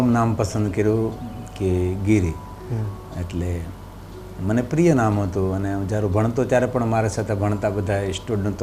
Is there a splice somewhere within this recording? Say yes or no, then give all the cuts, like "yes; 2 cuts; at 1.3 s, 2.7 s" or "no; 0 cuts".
no; 0 cuts